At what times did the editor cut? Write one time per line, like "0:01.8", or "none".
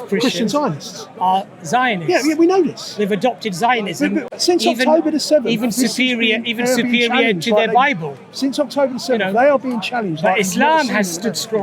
0:04.3